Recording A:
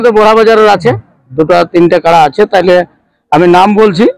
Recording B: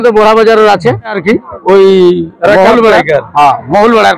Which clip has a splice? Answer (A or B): B